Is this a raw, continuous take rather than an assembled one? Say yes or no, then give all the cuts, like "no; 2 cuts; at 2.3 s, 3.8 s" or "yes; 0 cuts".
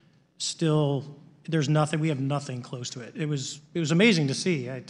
yes; 0 cuts